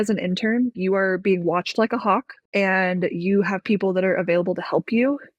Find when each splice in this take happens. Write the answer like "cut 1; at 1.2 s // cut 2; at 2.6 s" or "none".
cut 1; at 0.7 s // cut 2; at 2.4 s